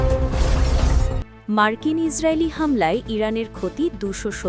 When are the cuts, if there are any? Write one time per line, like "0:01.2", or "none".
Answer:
none